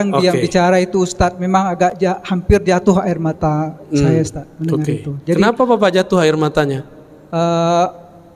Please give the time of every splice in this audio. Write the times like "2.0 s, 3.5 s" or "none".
none

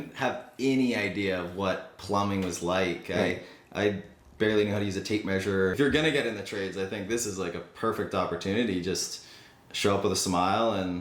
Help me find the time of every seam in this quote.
5.7 s

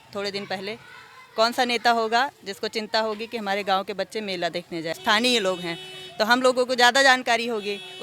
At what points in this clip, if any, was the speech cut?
5.0 s

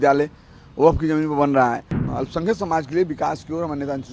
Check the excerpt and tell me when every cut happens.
2.0 s

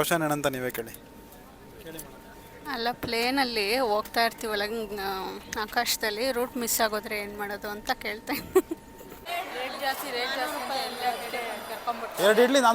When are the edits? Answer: 9.3 s

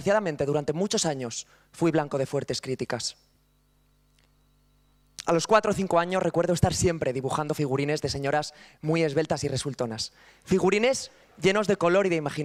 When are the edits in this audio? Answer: none

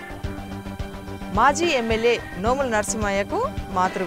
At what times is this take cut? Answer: 1.3 s

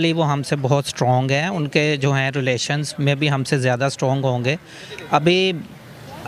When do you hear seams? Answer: none

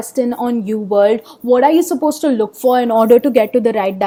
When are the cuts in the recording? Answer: none

